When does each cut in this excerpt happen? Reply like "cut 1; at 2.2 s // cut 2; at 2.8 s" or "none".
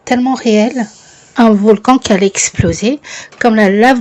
cut 1; at 1.3 s

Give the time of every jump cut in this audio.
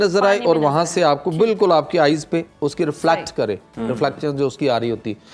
none

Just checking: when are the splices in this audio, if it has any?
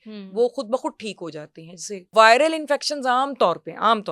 cut 1; at 2.1 s

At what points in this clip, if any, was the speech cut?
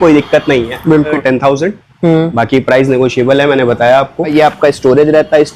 cut 1; at 1.1 s // cut 2; at 4.3 s

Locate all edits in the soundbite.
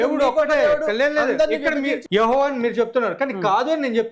cut 1; at 2.0 s

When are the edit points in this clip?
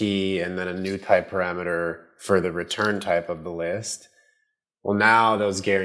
none

